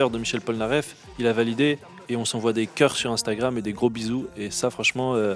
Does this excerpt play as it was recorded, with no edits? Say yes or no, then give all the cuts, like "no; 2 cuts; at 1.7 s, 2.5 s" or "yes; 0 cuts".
yes; 0 cuts